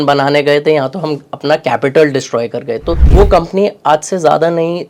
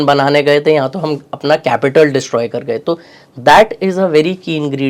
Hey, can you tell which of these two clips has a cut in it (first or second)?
first